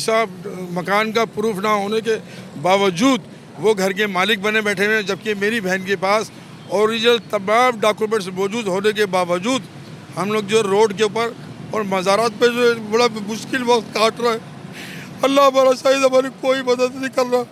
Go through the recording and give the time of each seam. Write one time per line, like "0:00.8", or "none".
none